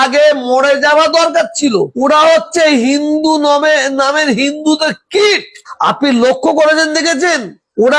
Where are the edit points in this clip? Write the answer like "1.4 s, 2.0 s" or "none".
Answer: none